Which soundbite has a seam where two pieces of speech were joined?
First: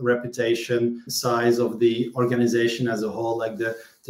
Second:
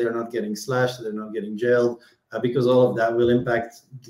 first; 1 cut; at 1.1 s

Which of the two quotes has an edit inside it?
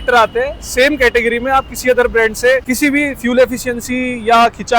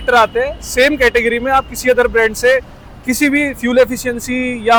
first; 1 cut; at 2.7 s

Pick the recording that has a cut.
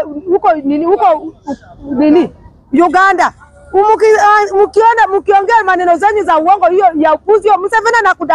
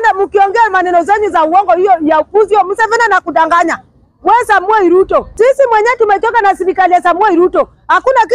second; 1 cut; at 5.3 s

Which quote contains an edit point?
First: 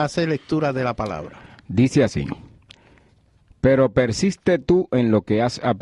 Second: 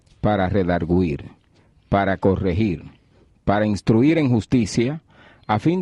second; 1 cut; at 3.7 s

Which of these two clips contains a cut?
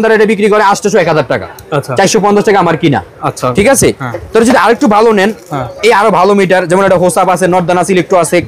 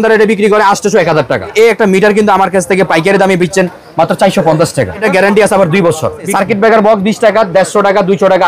second; 3 cuts; at 1.5 s, 5.0 s, 6.3 s

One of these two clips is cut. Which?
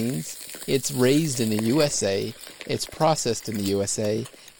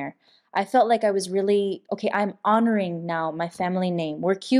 second; 1 cut; at 1.9 s

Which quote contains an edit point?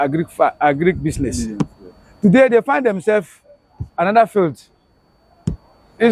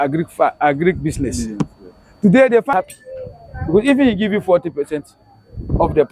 second; 1 cut; at 2.7 s

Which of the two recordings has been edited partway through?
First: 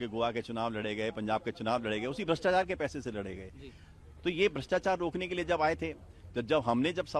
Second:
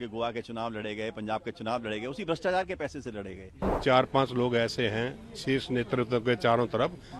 second; 1 cut; at 3.7 s

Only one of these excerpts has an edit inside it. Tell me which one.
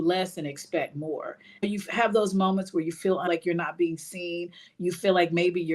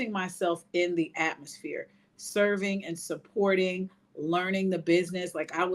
first; 2 cuts; at 1.6 s, 3.3 s

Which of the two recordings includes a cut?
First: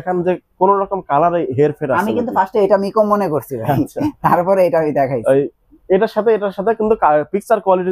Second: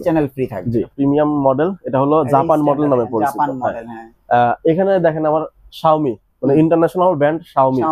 second; 1 cut; at 0.9 s

